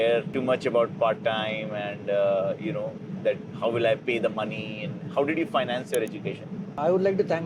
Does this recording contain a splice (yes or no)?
no